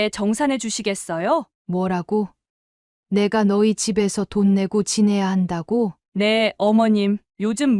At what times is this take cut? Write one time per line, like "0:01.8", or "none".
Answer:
0:01.5